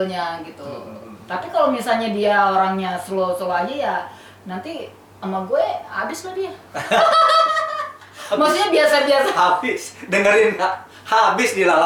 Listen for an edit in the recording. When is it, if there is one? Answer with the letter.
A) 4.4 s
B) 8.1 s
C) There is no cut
C